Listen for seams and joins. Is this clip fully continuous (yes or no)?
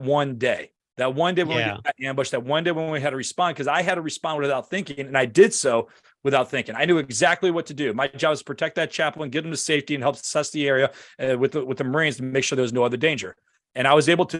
yes